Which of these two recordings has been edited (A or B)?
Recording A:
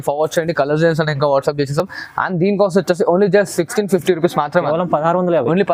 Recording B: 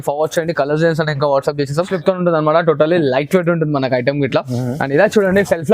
B